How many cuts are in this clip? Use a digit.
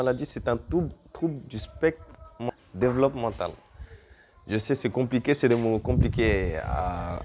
1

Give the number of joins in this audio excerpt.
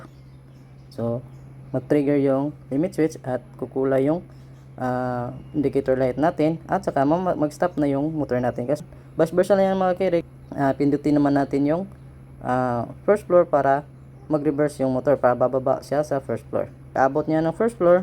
3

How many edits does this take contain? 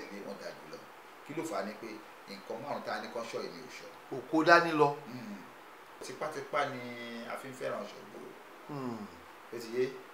1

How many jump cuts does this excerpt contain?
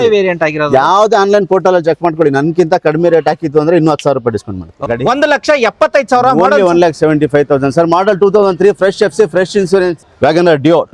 2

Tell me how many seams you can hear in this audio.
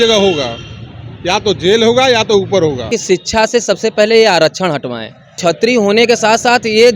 2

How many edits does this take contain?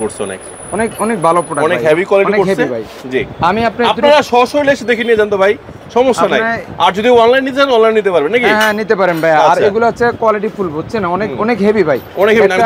0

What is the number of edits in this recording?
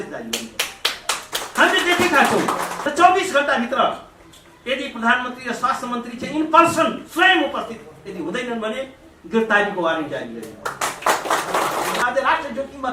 2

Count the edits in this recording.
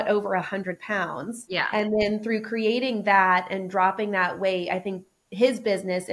1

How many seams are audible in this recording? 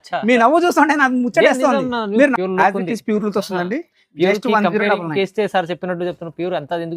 1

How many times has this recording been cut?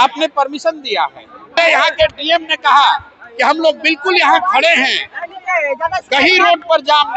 1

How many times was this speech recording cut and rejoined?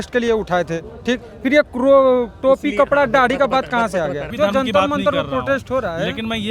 1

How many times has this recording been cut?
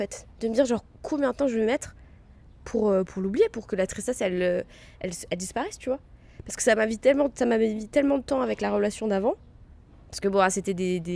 0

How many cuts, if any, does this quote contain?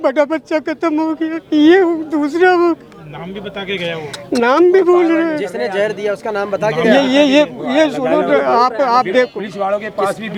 0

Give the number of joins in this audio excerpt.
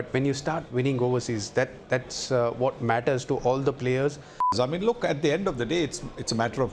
1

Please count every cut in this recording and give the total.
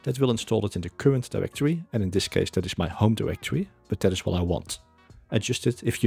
0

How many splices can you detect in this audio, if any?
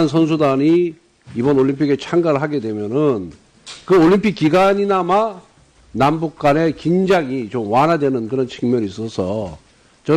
1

